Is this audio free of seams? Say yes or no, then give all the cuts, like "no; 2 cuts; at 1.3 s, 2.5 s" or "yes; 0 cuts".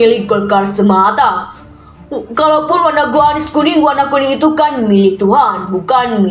yes; 0 cuts